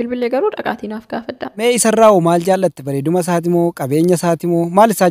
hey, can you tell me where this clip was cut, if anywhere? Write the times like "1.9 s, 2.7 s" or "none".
1.5 s